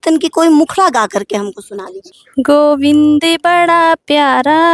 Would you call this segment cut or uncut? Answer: uncut